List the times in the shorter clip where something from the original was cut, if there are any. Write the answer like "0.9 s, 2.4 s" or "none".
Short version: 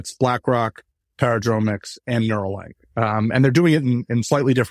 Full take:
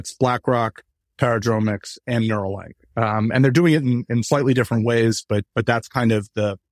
none